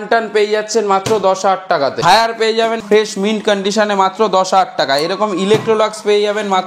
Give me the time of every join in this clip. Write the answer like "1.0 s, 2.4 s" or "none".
2.0 s, 2.8 s